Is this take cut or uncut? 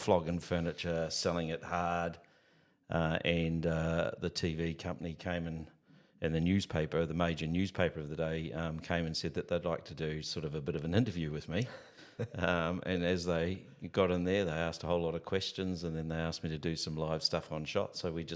uncut